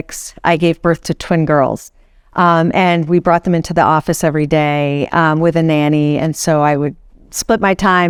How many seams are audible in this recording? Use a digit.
0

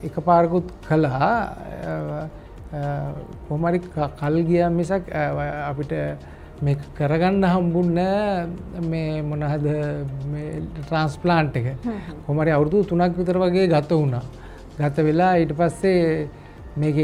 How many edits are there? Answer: 0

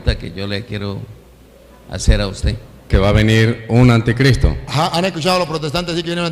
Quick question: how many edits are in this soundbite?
1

